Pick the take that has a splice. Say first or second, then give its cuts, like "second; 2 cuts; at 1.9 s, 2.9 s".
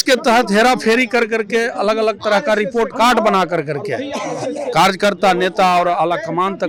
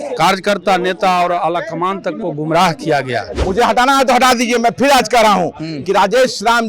second; 1 cut; at 3.3 s